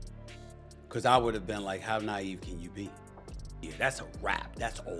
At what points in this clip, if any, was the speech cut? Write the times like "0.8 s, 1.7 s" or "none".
none